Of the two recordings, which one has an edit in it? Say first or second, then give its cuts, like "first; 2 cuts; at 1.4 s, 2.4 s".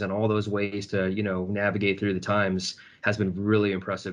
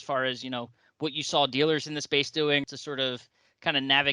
second; 1 cut; at 2.6 s